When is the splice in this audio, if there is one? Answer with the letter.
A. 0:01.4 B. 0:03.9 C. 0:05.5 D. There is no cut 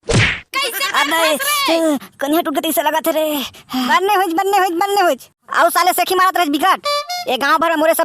B